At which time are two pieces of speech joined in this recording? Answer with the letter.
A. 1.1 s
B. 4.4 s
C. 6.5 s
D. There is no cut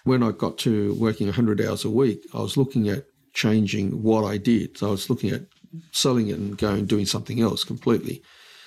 D